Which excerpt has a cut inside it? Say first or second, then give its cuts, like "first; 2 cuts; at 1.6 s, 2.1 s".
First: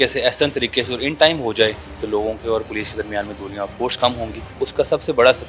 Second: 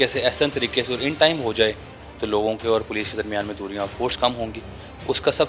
first; 2 cuts; at 1.9 s, 4.4 s